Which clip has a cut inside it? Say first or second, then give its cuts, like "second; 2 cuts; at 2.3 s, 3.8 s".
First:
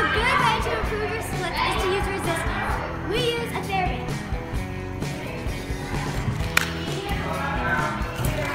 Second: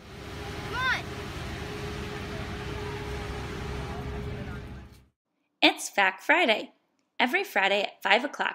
second; 1 cut; at 1.5 s